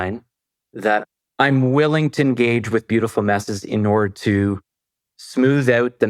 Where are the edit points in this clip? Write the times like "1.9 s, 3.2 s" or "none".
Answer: none